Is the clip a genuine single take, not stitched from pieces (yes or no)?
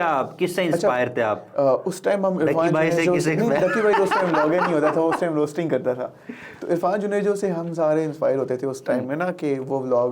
yes